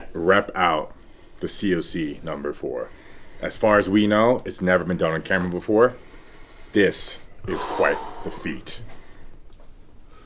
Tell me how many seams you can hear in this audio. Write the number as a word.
one